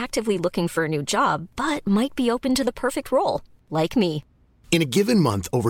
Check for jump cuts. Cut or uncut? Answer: uncut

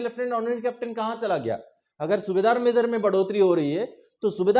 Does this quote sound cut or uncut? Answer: uncut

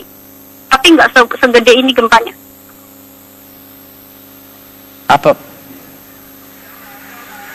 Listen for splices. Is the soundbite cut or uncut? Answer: cut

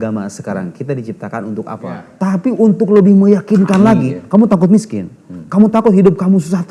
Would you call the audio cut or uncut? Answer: cut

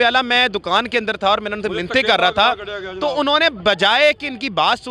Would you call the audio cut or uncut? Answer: uncut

